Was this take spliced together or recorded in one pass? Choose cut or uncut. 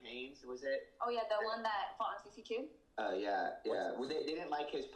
uncut